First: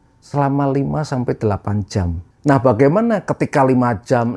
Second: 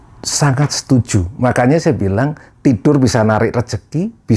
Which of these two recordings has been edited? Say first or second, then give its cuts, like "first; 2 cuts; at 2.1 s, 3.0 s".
first; 1 cut; at 2.2 s